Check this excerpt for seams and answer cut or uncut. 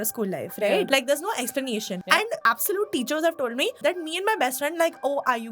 cut